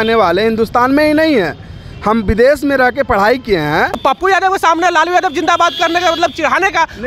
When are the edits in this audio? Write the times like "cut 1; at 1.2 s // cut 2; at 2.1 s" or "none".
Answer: cut 1; at 4.0 s